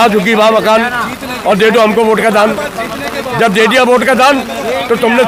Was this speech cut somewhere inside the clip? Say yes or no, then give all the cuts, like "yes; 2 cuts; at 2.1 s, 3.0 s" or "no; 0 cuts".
no; 0 cuts